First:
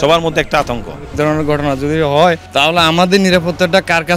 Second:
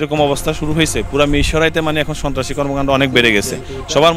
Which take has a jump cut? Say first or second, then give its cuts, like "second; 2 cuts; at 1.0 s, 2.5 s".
first; 2 cuts; at 1.1 s, 2.4 s